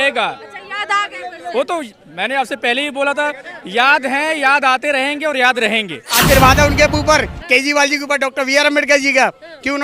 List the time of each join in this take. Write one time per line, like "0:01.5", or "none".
0:06.1